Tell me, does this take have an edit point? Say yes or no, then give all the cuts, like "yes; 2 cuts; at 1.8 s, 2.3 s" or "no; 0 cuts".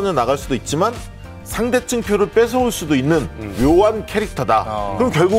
no; 0 cuts